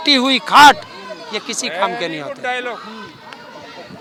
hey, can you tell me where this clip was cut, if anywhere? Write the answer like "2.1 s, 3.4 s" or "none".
none